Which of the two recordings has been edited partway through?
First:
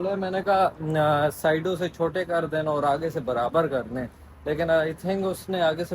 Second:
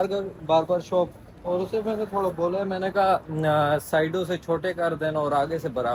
first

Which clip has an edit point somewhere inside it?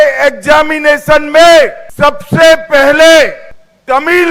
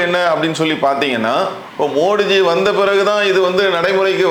first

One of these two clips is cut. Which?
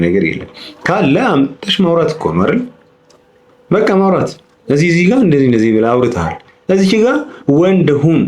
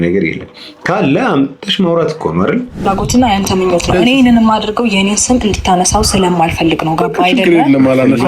second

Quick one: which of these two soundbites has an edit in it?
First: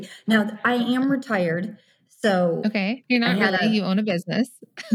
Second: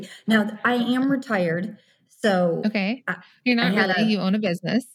first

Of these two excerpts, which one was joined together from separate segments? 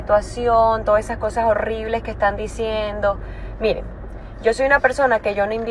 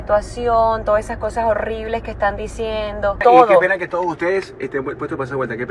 second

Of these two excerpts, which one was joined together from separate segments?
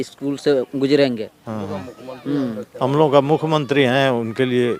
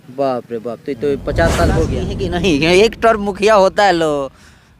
second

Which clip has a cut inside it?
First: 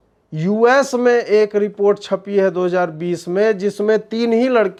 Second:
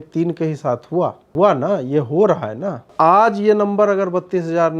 second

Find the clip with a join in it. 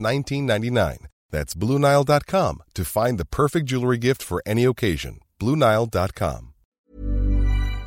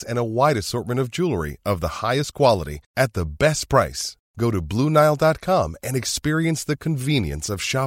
first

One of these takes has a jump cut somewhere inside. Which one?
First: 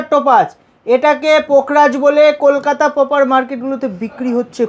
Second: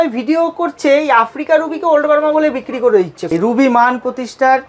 second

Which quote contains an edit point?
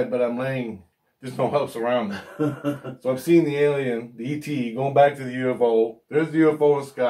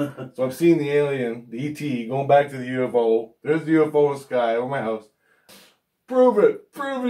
second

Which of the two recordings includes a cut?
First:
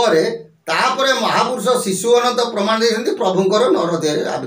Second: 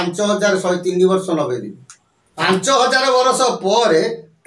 second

